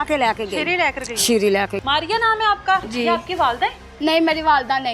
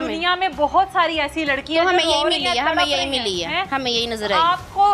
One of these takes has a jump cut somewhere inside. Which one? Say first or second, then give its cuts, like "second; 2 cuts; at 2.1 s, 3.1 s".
first; 2 cuts; at 1.8 s, 2.9 s